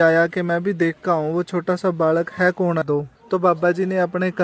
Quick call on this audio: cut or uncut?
cut